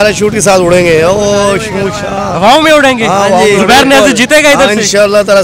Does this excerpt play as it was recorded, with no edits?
yes; 0 cuts

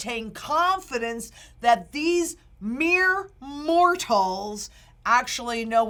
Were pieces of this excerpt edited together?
no; 0 cuts

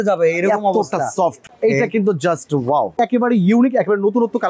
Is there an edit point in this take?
yes; 2 cuts; at 1.4 s, 3.0 s

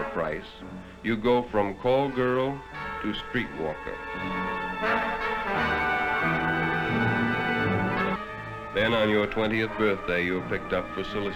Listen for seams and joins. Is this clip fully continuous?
no; 1 cut; at 8.2 s

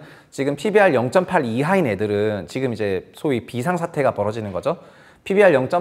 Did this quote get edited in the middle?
no; 0 cuts

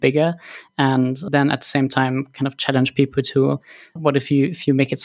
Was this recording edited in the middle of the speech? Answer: no; 0 cuts

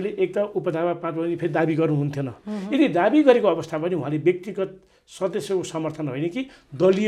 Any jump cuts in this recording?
no; 0 cuts

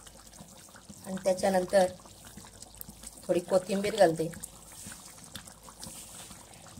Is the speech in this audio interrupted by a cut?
no; 0 cuts

